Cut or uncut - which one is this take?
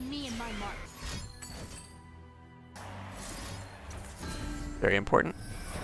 cut